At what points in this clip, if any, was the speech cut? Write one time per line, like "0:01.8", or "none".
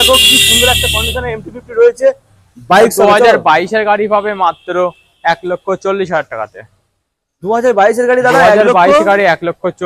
none